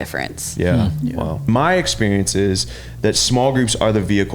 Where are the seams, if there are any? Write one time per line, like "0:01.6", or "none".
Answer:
0:01.5